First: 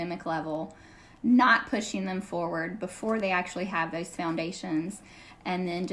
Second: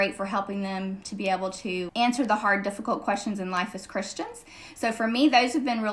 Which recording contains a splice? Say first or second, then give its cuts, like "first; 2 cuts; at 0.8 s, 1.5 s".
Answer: second; 1 cut; at 1.9 s